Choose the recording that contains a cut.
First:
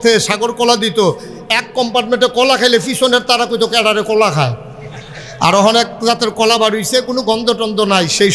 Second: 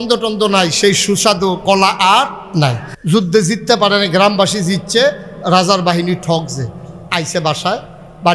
second; 1 cut; at 2.9 s

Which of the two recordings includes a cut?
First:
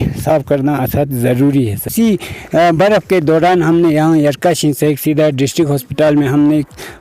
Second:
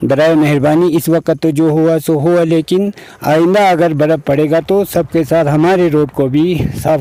first; 1 cut; at 1.9 s

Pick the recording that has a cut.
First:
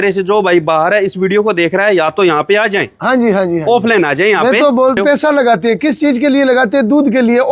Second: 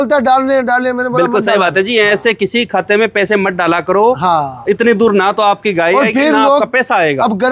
first; 1 cut; at 5.0 s

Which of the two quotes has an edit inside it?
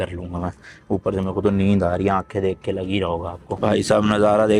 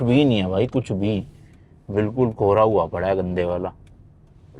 first; 1 cut; at 3.6 s

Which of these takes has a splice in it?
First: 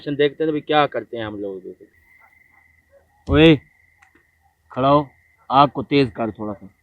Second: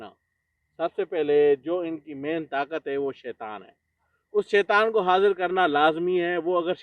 first; 1 cut; at 1.8 s

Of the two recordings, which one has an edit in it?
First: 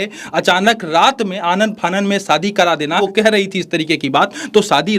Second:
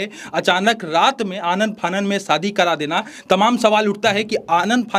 first; 1 cut; at 3.0 s

